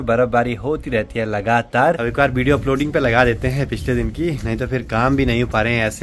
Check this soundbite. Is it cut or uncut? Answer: uncut